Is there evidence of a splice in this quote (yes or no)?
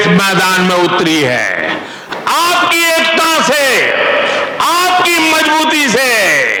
no